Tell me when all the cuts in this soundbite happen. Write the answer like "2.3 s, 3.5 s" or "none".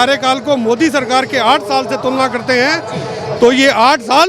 none